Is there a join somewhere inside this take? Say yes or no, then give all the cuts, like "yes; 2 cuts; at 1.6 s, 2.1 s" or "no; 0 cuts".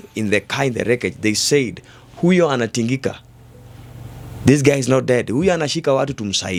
no; 0 cuts